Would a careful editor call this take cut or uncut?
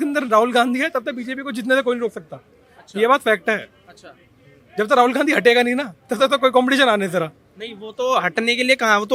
uncut